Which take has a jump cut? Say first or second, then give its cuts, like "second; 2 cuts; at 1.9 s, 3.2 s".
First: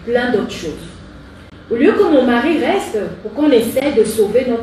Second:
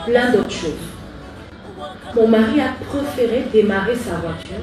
second; 1 cut; at 1.5 s